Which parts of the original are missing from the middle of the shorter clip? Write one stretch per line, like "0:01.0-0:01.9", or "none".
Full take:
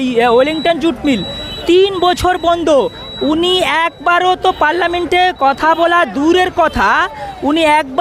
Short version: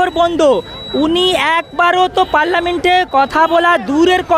none

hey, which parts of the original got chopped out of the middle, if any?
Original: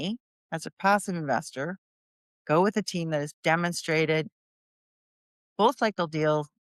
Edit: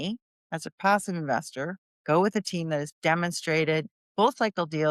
0:01.8-0:02.3
0:04.4-0:05.4

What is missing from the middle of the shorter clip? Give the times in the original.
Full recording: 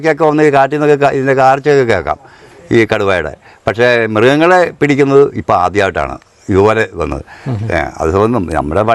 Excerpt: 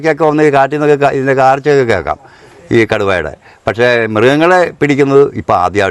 none

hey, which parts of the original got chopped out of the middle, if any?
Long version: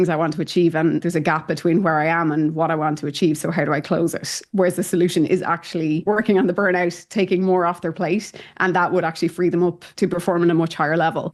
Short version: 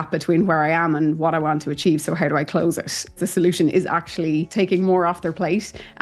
0:04.5-0:04.7
0:06.0-0:07.1

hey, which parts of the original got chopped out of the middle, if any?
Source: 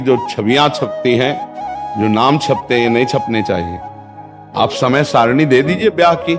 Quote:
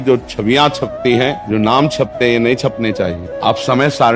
0:01.4-0:01.9
0:03.7-0:04.4

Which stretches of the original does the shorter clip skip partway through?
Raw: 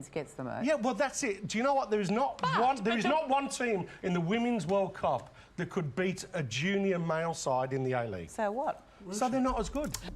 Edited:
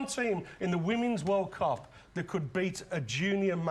none

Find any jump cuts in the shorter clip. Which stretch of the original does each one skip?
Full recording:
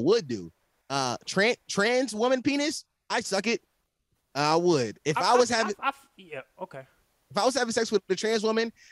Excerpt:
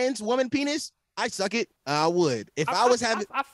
0:03.7-0:04.3

